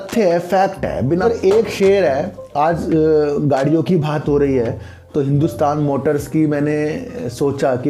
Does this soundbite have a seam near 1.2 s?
yes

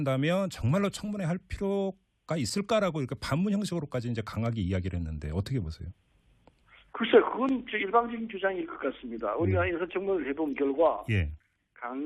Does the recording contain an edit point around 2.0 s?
yes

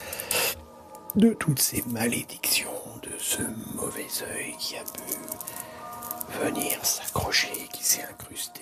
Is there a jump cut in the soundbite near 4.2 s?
no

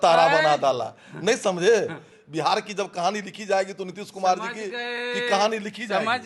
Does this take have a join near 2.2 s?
yes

